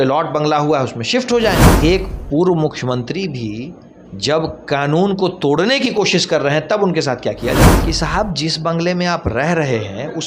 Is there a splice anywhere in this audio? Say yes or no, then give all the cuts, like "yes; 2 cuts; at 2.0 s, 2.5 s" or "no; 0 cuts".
yes; 2 cuts; at 1.7 s, 7.8 s